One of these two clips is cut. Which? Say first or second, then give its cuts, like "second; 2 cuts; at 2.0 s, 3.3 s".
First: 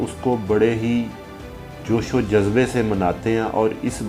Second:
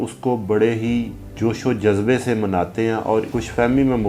second; 2 cuts; at 1.2 s, 3.3 s